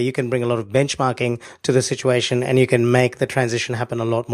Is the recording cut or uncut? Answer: cut